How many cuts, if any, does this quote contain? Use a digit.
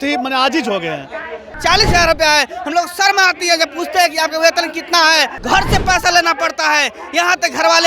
2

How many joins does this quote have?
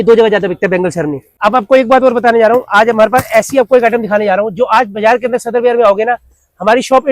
1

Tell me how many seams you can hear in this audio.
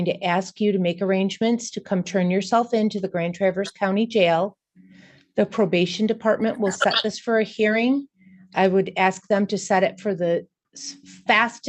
0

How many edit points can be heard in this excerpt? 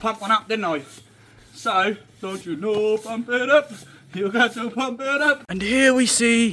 1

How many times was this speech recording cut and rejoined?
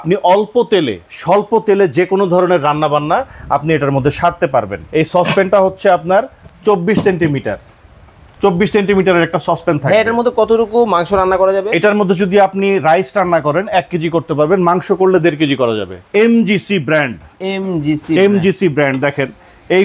2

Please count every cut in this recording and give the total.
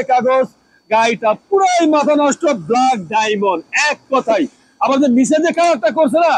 0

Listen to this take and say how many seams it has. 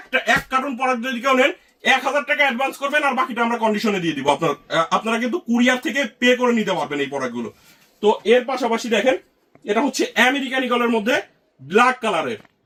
0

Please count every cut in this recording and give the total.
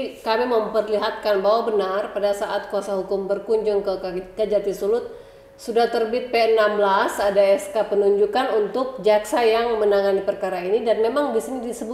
0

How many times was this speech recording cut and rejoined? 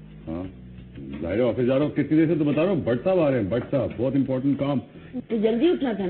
1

